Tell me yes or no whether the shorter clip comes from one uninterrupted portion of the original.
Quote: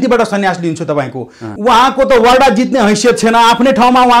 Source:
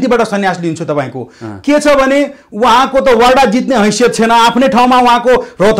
no